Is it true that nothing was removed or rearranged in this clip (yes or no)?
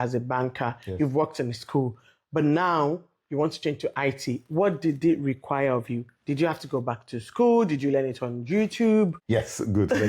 yes